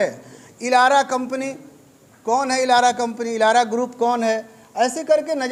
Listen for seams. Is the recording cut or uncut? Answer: uncut